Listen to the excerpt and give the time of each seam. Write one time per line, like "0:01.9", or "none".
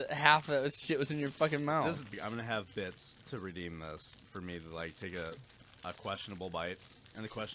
0:02.1